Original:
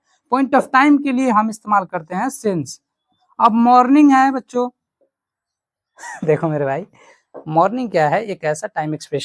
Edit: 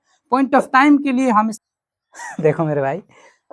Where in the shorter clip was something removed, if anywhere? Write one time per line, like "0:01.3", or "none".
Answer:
0:01.6